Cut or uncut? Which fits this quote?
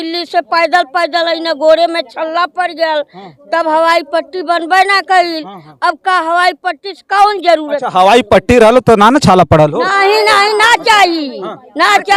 uncut